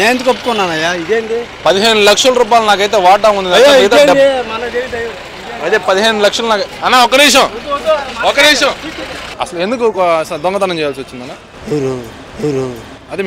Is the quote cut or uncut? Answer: cut